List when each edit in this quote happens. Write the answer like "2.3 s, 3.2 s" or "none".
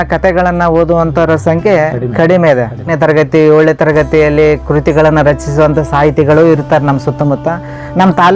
2.9 s

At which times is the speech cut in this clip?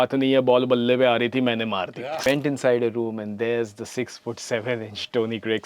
2.2 s

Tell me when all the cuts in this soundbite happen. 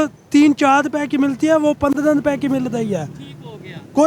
none

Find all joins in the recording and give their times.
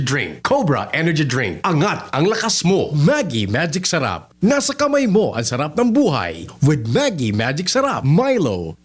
2.9 s, 8.0 s

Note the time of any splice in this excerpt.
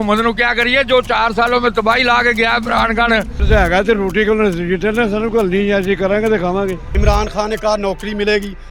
3.3 s, 6.8 s

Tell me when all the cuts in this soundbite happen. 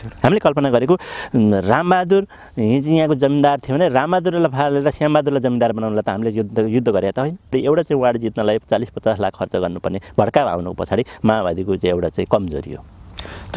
7.5 s

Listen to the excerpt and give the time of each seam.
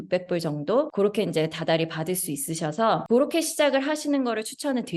0.9 s, 3.0 s

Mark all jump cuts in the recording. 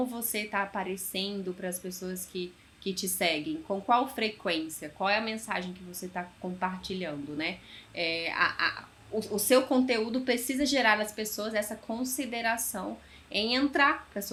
none

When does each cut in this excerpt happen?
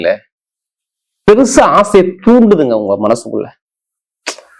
none

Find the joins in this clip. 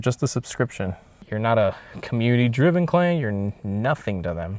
1.1 s

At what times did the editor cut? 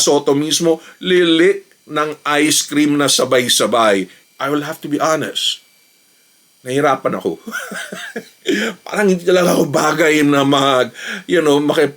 1.0 s, 4.2 s

